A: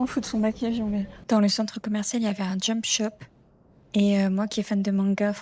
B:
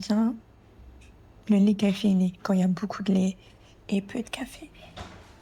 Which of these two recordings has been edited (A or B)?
A